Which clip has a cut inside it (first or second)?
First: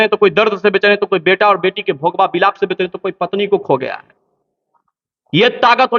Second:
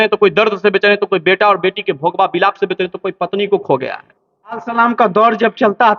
second